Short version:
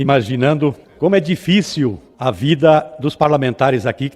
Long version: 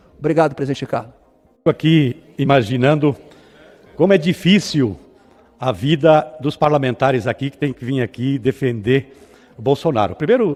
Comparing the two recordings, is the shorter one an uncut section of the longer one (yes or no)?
no